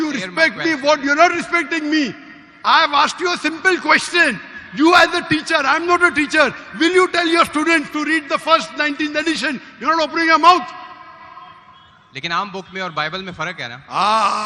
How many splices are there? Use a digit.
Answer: 0